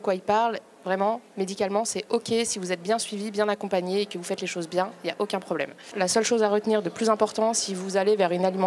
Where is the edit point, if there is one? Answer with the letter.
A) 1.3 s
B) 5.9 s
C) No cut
B